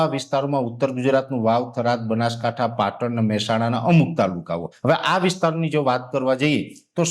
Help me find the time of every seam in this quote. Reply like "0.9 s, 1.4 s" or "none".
4.7 s